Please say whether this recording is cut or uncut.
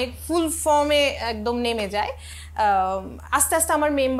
uncut